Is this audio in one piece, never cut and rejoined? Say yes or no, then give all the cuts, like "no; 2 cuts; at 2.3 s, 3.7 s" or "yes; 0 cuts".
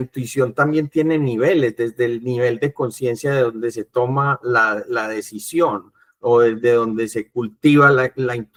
yes; 0 cuts